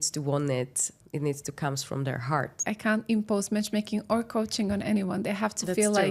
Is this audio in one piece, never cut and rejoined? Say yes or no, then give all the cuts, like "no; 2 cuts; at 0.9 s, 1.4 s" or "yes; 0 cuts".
no; 1 cut; at 2.6 s